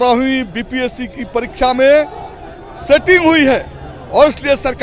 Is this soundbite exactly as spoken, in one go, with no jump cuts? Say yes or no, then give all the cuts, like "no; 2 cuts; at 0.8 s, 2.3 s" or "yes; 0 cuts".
yes; 0 cuts